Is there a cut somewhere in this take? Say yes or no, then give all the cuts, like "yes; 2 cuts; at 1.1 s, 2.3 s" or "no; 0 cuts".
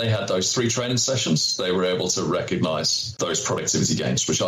yes; 1 cut; at 3.0 s